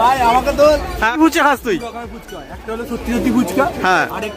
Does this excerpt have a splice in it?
yes; 1 cut; at 1.1 s

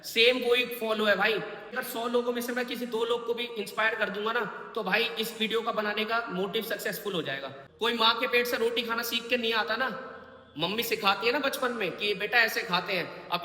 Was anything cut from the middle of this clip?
yes; 2 cuts; at 1.8 s, 7.5 s

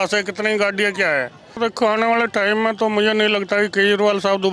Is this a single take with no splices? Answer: no; 1 cut; at 1.6 s

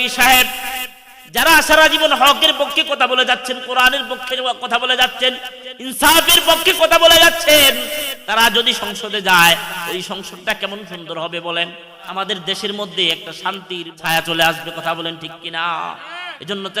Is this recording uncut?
no; 2 cuts; at 12.0 s, 13.9 s

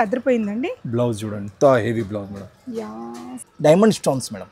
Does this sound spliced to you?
yes; 1 cut; at 3.4 s

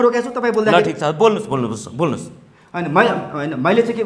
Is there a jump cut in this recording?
no; 0 cuts

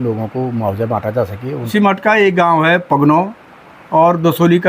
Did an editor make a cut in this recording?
yes; 1 cut; at 1.7 s

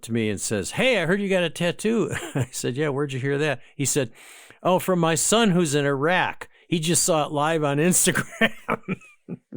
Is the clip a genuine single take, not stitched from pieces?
yes; 0 cuts

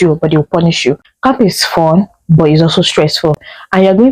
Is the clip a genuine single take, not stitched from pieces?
no; 1 cut; at 1.1 s

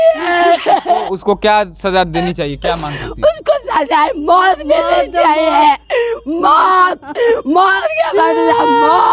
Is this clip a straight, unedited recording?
yes; 0 cuts

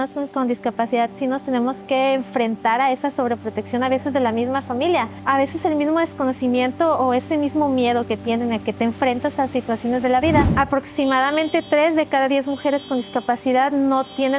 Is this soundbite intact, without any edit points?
no; 2 cuts; at 5.2 s, 10.5 s

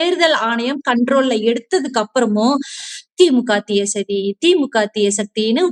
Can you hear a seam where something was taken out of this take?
no; 0 cuts

